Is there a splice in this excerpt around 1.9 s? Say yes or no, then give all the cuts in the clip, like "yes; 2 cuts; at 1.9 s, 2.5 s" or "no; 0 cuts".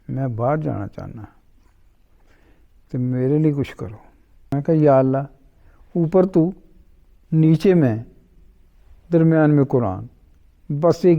no; 1 cut; at 4.6 s